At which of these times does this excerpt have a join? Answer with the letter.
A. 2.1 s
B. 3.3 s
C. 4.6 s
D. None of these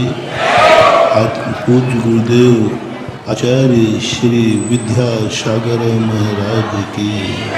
B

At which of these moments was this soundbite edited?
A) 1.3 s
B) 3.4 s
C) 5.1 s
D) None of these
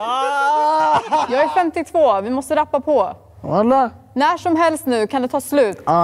A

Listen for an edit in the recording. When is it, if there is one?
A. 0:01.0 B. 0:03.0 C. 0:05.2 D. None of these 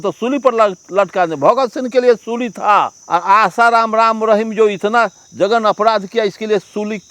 B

